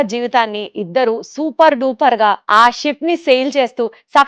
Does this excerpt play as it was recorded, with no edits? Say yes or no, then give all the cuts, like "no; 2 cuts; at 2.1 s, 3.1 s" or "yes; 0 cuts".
no; 1 cut; at 2.4 s